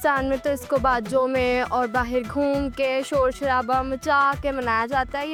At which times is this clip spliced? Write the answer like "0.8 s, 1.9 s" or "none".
none